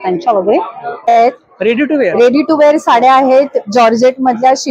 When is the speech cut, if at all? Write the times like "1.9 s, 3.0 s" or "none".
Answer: 1.1 s

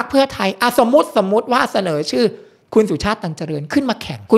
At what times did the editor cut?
none

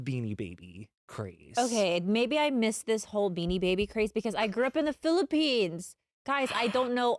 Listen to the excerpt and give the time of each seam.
none

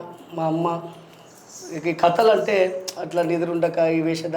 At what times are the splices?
none

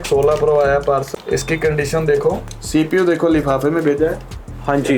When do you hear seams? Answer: 1.1 s, 2.4 s

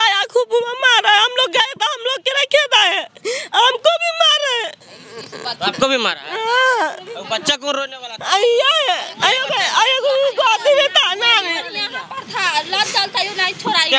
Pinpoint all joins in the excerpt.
none

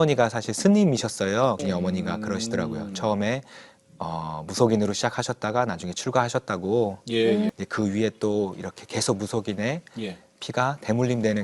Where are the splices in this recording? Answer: 1.6 s, 7.5 s

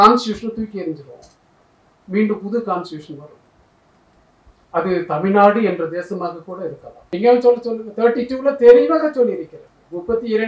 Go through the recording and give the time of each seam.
6.9 s

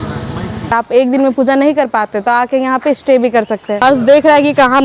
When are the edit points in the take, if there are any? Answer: 0.7 s, 3.7 s

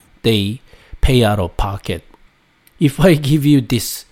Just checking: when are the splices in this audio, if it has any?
2.2 s

